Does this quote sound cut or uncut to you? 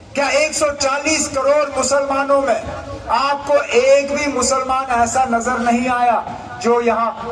uncut